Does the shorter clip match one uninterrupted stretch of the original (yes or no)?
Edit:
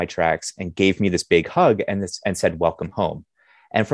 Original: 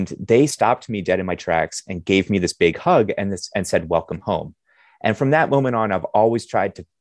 yes